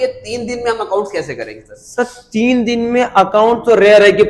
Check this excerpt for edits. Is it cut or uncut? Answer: uncut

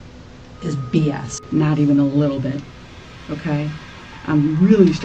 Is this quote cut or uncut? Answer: cut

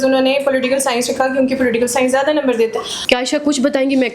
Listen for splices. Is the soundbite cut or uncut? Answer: cut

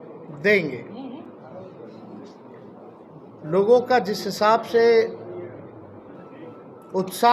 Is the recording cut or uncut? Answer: uncut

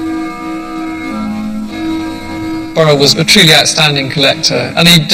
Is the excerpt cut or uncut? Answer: uncut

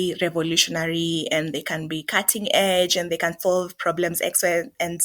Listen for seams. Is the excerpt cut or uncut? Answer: uncut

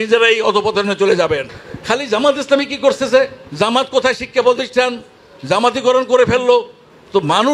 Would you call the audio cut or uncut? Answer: cut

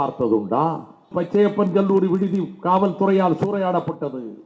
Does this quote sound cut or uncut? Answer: cut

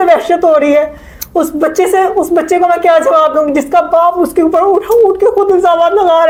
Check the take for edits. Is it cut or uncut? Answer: uncut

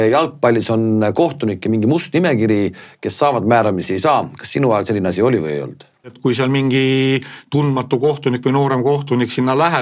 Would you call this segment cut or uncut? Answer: cut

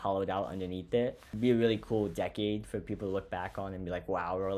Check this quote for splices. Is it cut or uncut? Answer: cut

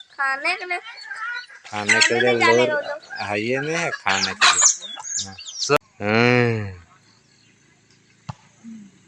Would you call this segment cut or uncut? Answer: cut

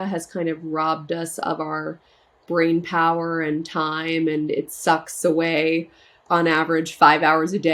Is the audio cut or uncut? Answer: uncut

